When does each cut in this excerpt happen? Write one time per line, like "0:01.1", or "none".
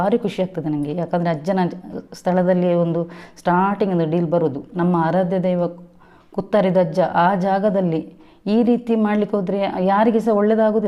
0:04.7